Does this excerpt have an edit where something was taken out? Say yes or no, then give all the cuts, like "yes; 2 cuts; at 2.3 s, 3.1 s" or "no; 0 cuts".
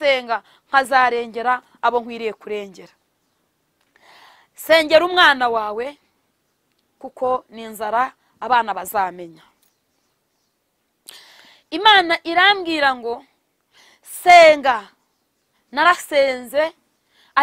no; 0 cuts